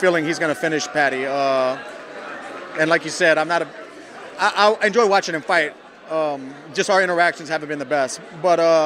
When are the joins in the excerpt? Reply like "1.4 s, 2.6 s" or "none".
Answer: none

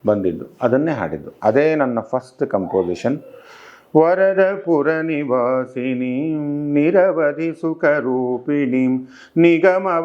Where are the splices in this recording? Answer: none

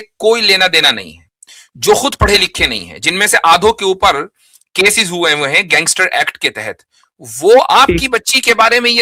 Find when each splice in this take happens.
none

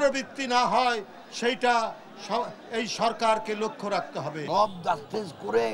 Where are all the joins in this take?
4.4 s

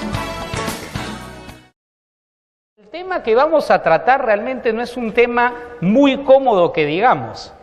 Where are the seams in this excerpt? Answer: none

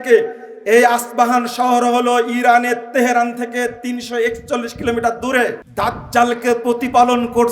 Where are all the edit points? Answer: 5.6 s

